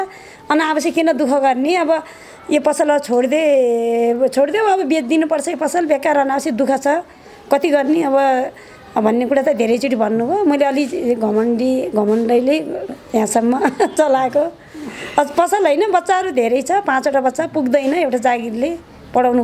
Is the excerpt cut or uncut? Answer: uncut